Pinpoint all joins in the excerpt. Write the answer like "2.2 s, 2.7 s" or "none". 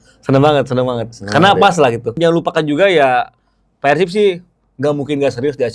2.1 s